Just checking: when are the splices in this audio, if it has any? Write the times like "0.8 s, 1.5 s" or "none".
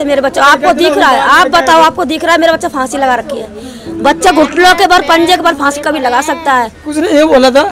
6.8 s